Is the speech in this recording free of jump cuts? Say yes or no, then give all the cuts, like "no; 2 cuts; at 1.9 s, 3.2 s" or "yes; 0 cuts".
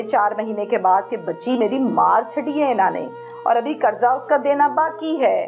yes; 0 cuts